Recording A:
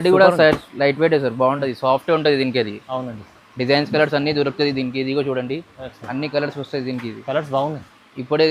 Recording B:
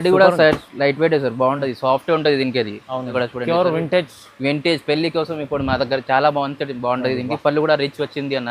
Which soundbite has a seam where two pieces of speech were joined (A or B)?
B